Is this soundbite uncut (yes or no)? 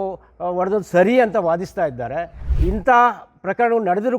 no